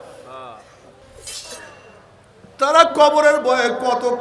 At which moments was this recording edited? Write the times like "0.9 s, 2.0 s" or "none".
1.5 s